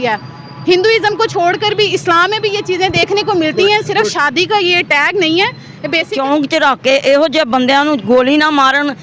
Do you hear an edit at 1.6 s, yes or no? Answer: no